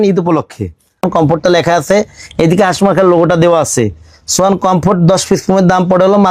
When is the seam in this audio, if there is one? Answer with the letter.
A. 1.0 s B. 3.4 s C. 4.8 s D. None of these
A